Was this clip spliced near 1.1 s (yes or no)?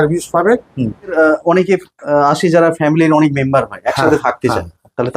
yes